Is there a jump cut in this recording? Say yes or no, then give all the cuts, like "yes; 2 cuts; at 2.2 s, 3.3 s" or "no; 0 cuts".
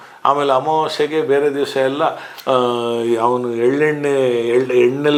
no; 0 cuts